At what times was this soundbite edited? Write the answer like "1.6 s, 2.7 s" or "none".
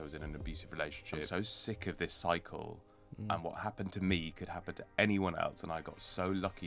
1.3 s